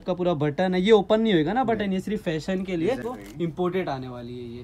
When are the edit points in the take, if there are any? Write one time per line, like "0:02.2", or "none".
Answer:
0:03.0